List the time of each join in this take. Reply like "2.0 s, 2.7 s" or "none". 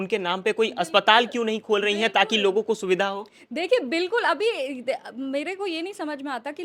none